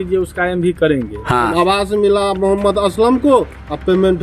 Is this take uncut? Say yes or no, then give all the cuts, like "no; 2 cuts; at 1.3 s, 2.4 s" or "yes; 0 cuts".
no; 1 cut; at 1.5 s